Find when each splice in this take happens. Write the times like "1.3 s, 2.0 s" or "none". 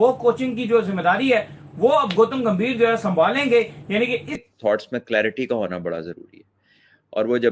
4.4 s